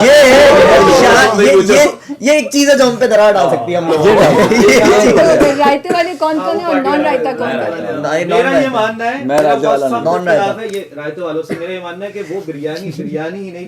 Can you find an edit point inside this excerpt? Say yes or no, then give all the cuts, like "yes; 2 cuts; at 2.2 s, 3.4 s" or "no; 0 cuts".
no; 0 cuts